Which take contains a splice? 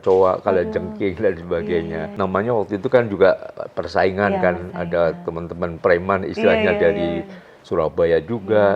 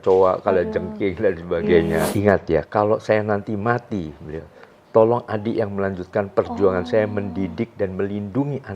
second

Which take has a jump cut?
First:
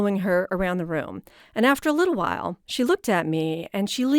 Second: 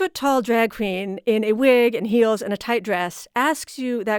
first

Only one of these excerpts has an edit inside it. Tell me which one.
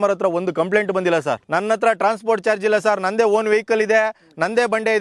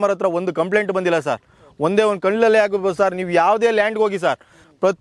first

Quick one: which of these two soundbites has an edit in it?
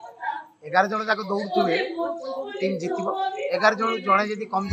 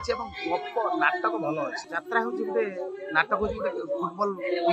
second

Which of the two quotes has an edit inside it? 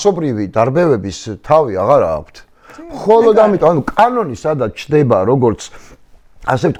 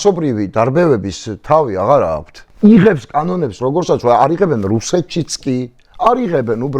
second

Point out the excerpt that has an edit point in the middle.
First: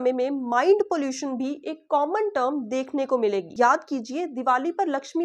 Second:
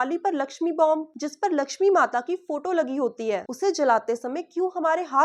first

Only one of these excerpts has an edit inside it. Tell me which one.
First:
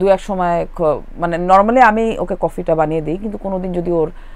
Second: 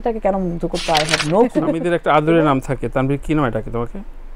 second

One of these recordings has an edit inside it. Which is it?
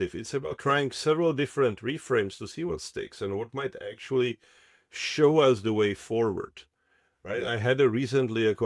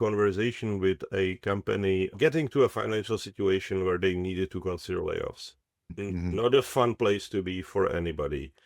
second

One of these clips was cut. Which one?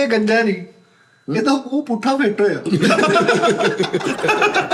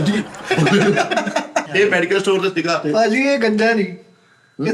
second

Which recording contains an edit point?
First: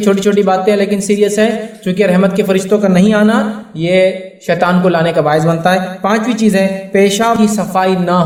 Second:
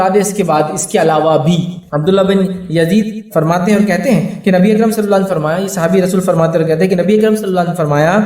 second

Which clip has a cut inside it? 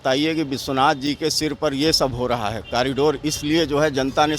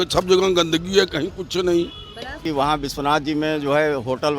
second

